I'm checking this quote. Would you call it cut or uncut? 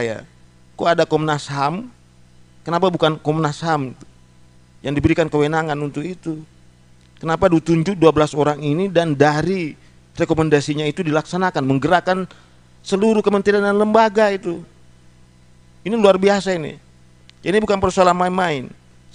uncut